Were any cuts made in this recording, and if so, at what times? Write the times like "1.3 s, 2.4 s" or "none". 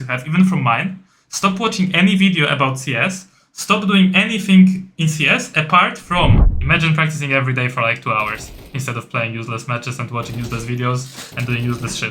6.5 s